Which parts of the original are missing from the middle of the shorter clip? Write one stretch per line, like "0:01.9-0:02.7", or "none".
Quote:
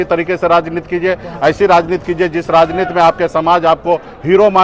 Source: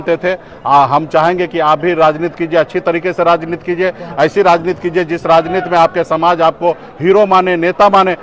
none